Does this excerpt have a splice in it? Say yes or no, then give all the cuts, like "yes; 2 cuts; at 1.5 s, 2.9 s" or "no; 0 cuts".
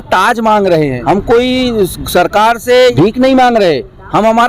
yes; 2 cuts; at 1.0 s, 2.9 s